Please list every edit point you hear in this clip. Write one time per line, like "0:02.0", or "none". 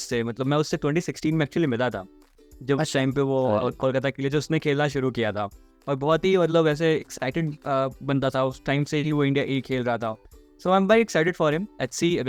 none